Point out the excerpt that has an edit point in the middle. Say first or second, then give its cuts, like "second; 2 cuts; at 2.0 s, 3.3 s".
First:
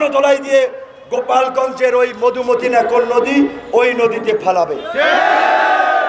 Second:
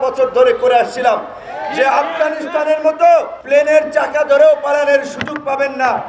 second; 1 cut; at 3.4 s